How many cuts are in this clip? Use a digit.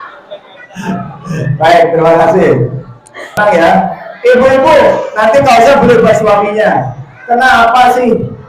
1